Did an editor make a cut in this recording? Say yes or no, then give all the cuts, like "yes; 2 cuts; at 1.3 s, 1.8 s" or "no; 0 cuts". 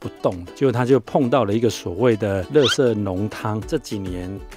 yes; 1 cut; at 3.6 s